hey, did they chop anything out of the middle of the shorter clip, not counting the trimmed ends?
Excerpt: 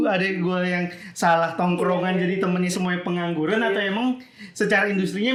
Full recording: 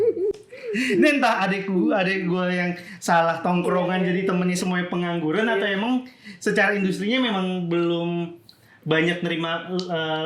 no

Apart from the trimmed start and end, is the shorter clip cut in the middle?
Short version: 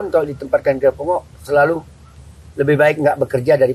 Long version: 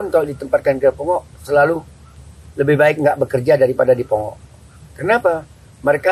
no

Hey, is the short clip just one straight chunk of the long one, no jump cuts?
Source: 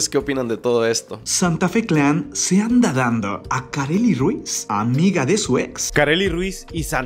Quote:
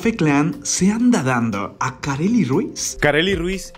no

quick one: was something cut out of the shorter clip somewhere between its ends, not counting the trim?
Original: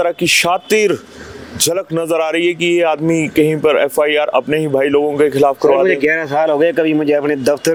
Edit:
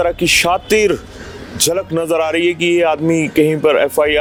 no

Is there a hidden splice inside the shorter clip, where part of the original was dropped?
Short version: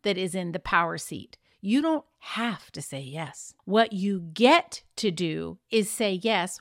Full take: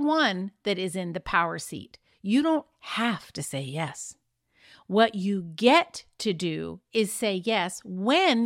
yes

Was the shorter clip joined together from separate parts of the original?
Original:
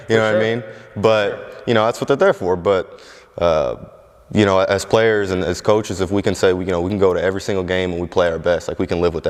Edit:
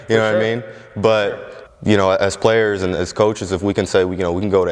yes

